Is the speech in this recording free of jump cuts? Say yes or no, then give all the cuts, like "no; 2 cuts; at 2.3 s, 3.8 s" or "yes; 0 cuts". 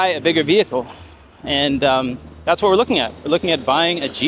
yes; 0 cuts